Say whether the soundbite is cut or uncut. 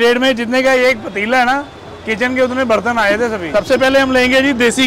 cut